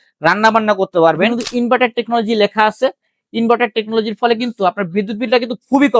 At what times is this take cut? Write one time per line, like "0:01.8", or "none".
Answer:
0:01.3